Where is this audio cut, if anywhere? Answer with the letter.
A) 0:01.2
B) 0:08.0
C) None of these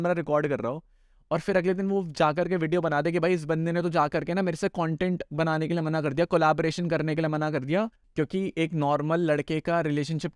B